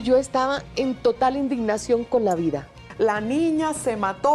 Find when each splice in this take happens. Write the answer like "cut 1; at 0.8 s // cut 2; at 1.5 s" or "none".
cut 1; at 2.9 s

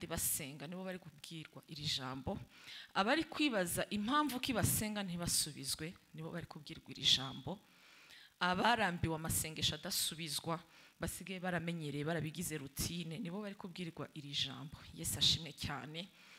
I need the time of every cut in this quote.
none

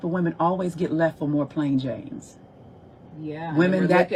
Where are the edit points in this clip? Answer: none

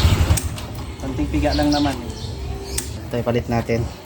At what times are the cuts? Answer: cut 1; at 3.0 s

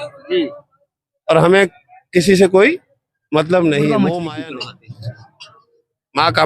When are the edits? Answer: cut 1; at 4.1 s

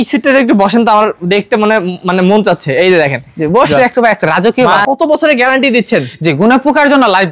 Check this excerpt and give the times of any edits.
cut 1; at 4.8 s

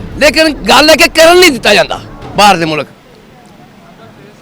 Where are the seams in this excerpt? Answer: none

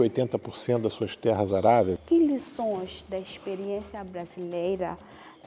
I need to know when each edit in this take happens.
cut 1; at 2.0 s

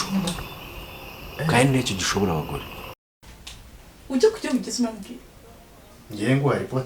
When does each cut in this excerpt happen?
cut 1; at 3.1 s

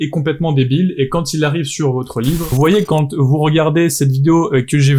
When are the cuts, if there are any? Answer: cut 1; at 2.5 s

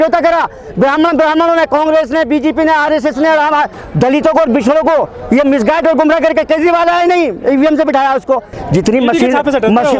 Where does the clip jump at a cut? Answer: cut 1; at 3.7 s // cut 2; at 8.6 s

